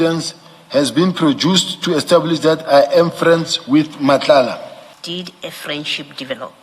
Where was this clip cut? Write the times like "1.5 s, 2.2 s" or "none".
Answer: 4.9 s

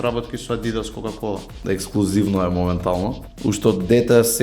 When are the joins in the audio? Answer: 1.5 s, 3.2 s

